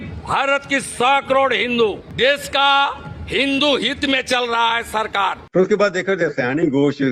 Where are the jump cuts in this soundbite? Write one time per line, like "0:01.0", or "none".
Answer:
0:02.1
0:05.4